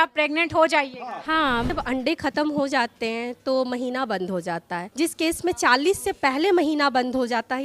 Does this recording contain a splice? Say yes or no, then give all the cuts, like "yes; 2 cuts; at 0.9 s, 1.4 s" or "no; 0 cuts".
yes; 2 cuts; at 1.7 s, 4.8 s